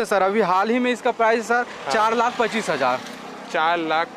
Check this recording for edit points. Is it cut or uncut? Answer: uncut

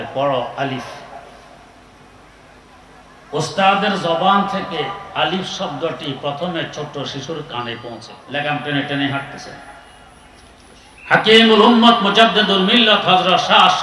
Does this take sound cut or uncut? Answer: cut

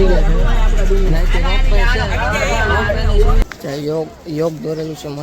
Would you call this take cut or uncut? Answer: cut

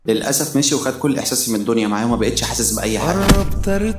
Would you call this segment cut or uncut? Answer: uncut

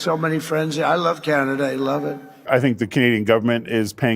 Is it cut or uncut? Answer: cut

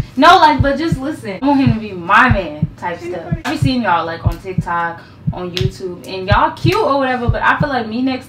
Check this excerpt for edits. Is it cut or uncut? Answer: cut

